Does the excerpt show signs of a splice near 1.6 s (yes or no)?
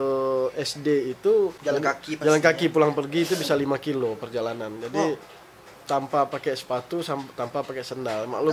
yes